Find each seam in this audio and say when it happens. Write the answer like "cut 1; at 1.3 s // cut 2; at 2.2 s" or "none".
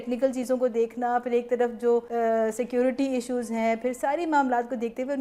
cut 1; at 2.1 s